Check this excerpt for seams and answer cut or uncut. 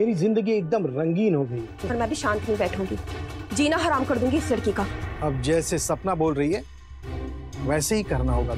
cut